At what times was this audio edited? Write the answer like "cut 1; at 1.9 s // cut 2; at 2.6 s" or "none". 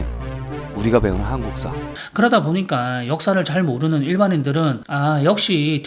none